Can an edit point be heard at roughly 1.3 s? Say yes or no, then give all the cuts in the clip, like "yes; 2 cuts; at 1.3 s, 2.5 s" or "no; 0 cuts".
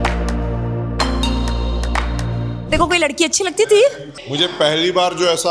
no; 1 cut; at 2.7 s